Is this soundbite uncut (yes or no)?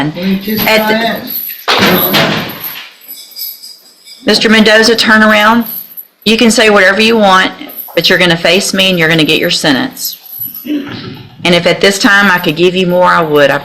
yes